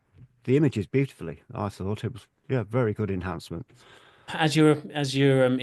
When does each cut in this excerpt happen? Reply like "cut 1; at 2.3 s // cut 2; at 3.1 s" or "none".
cut 1; at 4.3 s